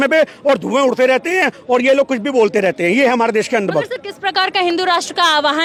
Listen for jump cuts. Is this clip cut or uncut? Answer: uncut